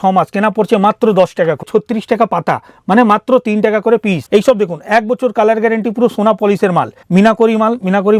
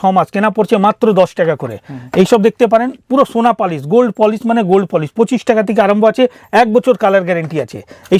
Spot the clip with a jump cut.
first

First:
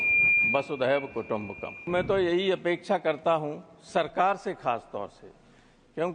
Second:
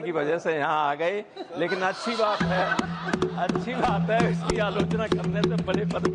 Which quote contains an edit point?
first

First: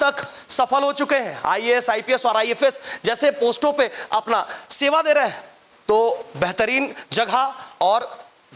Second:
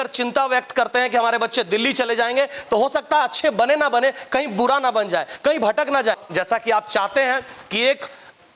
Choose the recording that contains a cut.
second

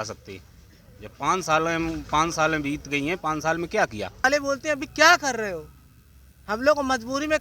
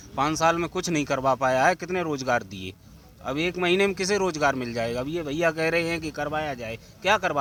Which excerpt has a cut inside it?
first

